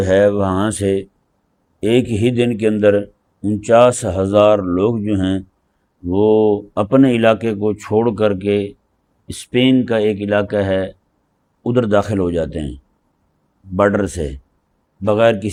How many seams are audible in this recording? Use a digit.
0